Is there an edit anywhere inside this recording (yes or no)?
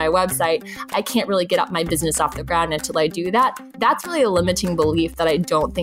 yes